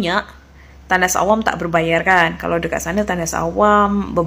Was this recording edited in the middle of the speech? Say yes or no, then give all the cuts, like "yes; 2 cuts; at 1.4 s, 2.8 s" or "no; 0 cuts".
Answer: no; 0 cuts